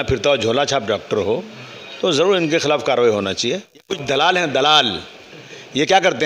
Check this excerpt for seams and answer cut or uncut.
cut